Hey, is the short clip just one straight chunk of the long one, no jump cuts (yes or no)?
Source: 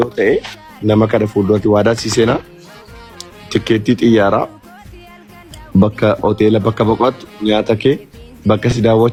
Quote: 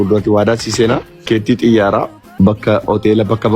no